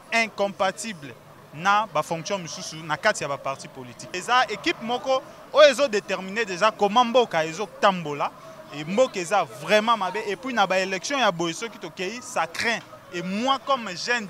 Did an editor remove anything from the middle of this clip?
yes; 1 cut; at 4.1 s

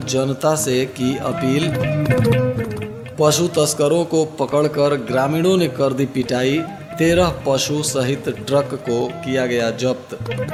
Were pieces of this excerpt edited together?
no; 0 cuts

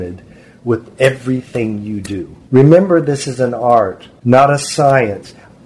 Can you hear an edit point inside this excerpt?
yes; 2 cuts; at 2.3 s, 4.1 s

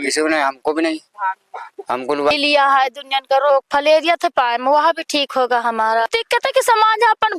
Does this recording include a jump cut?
yes; 2 cuts; at 2.3 s, 6.1 s

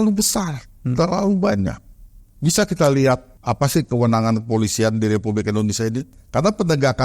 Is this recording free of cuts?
no; 2 cuts; at 3.3 s, 6.1 s

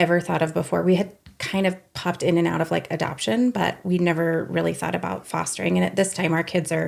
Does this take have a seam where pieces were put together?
no; 0 cuts

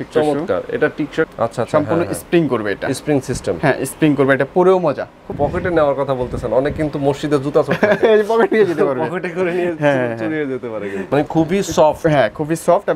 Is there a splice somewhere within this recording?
yes; 3 cuts; at 1.3 s, 5.3 s, 11.0 s

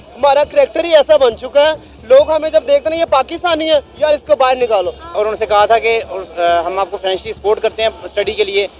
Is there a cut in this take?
yes; 1 cut; at 5.1 s

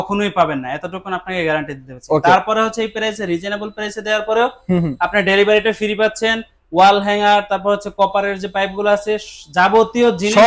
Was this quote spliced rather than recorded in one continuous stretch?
no; 0 cuts

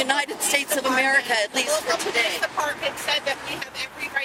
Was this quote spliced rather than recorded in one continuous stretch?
no; 0 cuts

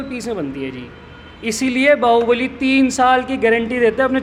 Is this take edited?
no; 0 cuts

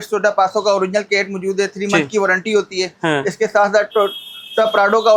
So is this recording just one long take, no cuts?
yes; 0 cuts

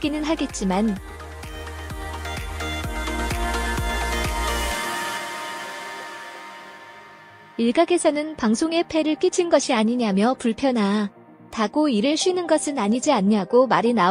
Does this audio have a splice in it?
no; 0 cuts

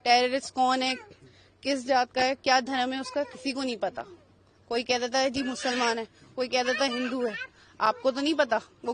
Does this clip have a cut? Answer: no; 0 cuts

